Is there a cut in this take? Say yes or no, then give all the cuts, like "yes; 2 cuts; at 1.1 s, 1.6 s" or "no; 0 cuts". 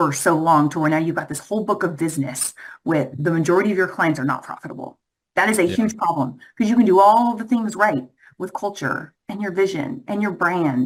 no; 0 cuts